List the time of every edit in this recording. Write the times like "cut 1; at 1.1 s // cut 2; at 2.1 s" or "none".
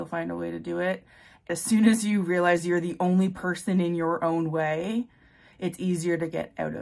cut 1; at 1.5 s